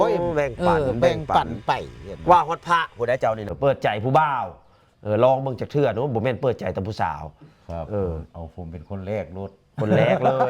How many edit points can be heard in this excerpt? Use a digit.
1